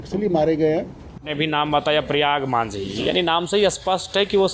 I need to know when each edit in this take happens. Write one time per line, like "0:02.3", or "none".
0:01.3